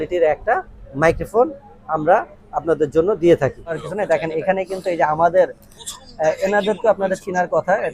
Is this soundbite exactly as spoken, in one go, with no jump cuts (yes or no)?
no